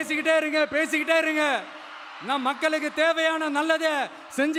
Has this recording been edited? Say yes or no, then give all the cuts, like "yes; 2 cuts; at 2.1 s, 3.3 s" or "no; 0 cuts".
no; 0 cuts